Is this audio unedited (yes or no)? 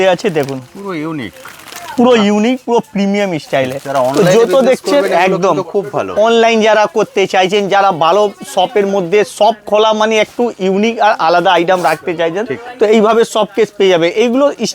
yes